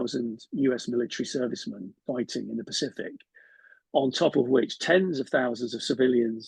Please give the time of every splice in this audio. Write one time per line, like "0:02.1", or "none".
none